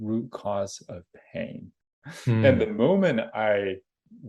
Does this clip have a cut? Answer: yes; 1 cut; at 2.1 s

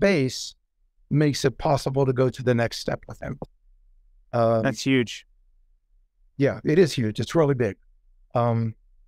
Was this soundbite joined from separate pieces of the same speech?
no; 0 cuts

